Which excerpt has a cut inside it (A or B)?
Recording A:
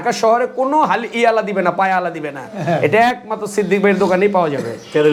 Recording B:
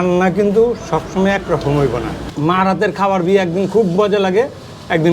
B